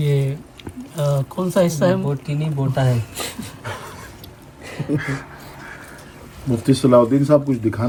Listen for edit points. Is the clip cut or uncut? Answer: uncut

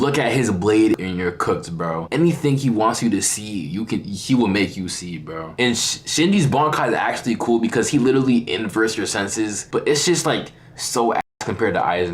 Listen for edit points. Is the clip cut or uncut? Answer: cut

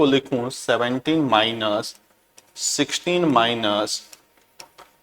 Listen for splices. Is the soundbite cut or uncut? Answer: uncut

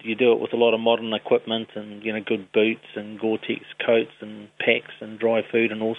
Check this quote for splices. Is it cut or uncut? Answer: uncut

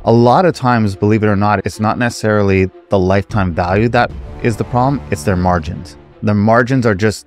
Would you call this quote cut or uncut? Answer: uncut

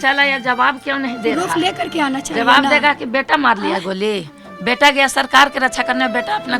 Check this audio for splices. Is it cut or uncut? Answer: uncut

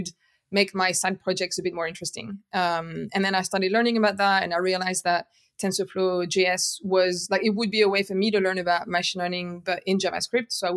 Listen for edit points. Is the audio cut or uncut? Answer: uncut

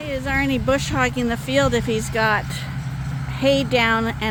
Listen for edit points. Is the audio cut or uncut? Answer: uncut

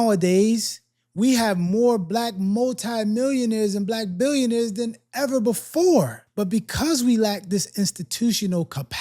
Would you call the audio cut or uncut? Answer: cut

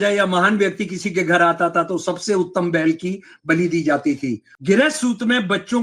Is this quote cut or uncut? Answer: cut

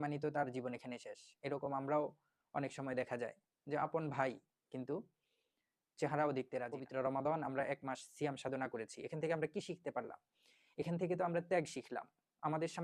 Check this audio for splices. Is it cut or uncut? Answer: cut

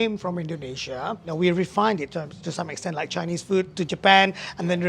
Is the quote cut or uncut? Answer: cut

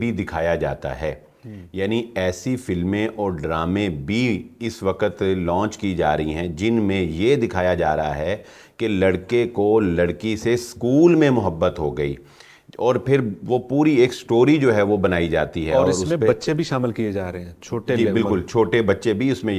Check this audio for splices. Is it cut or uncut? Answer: uncut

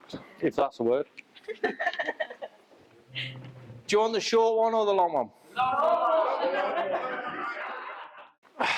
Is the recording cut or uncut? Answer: cut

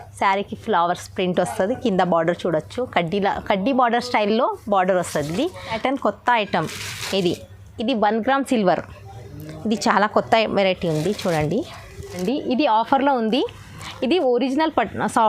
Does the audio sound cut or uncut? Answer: cut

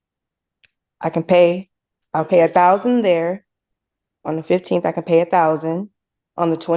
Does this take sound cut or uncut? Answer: uncut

